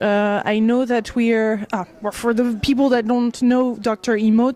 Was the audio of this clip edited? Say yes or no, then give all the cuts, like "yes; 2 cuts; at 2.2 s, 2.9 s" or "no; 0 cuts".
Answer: yes; 1 cut; at 3.6 s